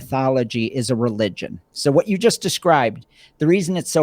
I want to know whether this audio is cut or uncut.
uncut